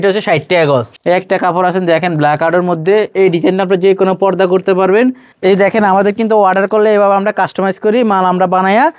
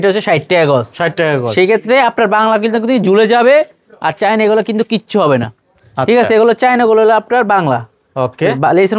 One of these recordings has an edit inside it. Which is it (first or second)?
first